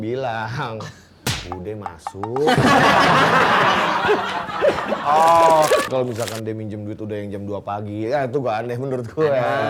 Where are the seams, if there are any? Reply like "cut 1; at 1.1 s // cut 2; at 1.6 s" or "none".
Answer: cut 1; at 5.9 s